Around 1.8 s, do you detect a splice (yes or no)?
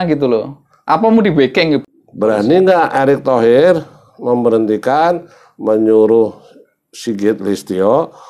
yes